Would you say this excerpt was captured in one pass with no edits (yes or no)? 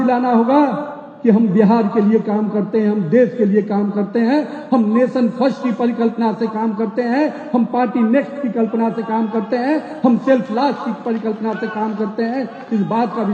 yes